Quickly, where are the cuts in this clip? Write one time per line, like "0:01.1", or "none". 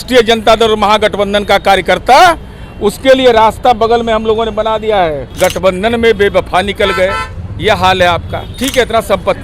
0:05.3
0:08.4